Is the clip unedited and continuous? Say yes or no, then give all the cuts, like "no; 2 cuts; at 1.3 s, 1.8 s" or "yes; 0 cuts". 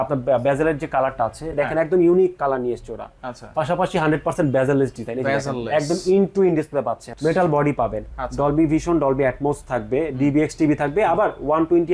no; 1 cut; at 7.1 s